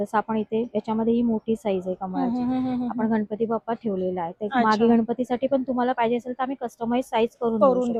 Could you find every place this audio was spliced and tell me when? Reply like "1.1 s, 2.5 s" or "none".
none